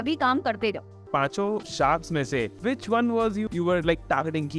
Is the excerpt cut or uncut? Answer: cut